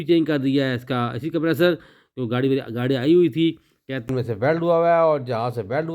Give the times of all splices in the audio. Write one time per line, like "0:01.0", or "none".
0:04.1